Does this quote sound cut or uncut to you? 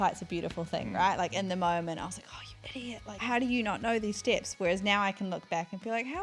cut